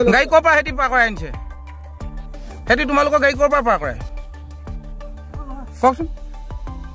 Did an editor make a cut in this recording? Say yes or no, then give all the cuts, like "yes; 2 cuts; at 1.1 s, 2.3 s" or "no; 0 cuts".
yes; 3 cuts; at 4.0 s, 5.4 s, 6.2 s